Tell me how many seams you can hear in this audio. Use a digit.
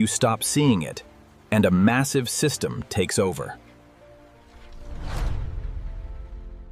0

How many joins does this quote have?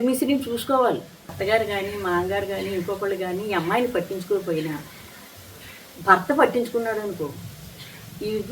1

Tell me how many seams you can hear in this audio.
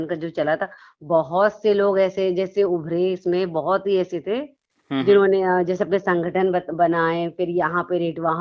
0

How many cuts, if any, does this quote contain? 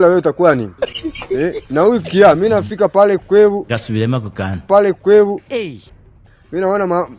0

